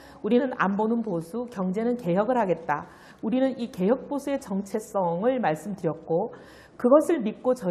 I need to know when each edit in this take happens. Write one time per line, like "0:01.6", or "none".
none

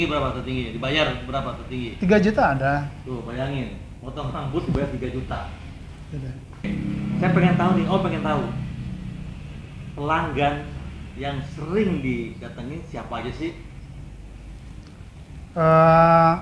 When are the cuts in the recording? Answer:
0:06.6

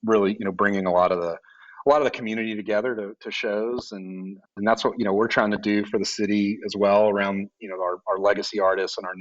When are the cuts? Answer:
0:04.5

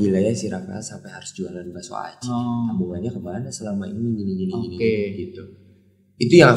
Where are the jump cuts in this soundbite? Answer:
none

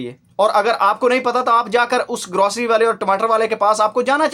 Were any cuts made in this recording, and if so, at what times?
none

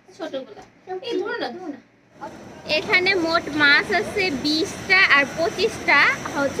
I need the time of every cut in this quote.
0:02.1

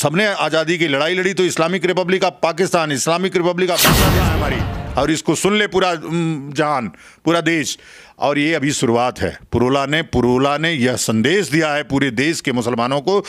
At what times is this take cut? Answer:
0:04.2

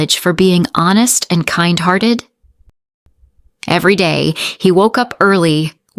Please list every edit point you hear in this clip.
none

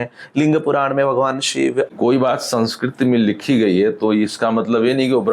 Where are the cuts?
0:01.9

